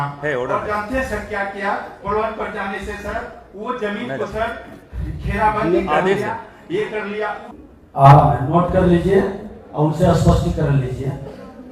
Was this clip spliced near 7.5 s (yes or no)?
yes